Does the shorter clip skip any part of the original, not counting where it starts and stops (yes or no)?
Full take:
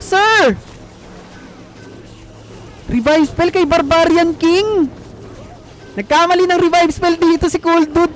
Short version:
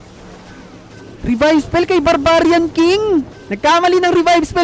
yes